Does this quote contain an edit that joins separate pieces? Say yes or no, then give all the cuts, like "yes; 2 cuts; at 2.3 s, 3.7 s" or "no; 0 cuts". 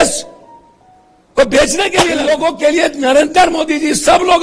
yes; 1 cut; at 2.0 s